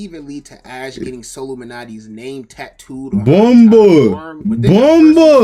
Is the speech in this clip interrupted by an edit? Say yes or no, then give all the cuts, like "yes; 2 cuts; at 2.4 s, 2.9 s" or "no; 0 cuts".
no; 0 cuts